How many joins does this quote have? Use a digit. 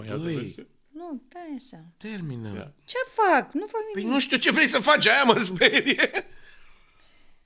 0